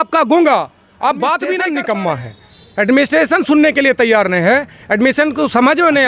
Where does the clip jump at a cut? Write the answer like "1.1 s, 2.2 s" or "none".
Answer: 1.6 s